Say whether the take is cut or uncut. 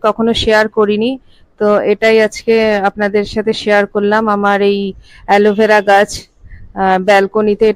uncut